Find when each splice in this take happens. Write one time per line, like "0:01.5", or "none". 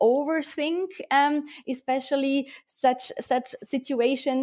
none